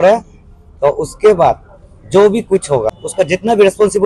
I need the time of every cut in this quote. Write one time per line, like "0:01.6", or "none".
0:02.9